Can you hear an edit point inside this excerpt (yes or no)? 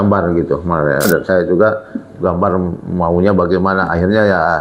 yes